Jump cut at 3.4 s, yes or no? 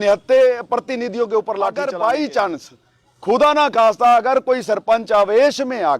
no